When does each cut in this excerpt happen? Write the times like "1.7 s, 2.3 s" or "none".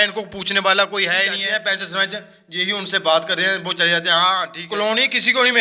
1.4 s, 4.6 s